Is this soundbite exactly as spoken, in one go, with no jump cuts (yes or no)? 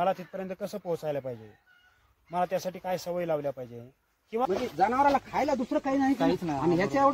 no